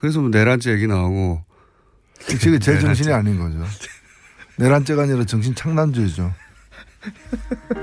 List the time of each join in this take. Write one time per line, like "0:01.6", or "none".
0:06.2